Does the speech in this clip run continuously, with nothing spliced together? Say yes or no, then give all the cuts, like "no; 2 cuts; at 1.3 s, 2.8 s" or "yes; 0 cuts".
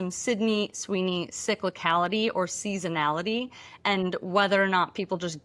yes; 0 cuts